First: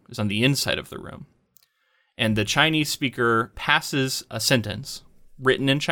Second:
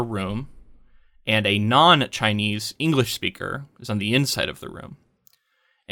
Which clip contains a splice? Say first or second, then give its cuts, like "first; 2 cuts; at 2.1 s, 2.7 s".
first; 1 cut; at 4.2 s